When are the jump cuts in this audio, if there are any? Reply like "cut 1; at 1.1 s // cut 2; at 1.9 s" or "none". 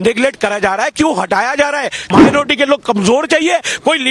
cut 1; at 2.0 s